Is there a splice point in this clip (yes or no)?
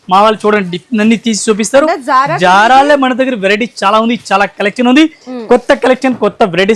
yes